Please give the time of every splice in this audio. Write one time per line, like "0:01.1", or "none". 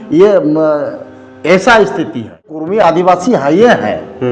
0:02.6